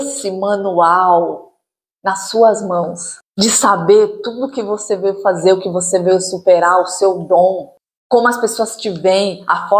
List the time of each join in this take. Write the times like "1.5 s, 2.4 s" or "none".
none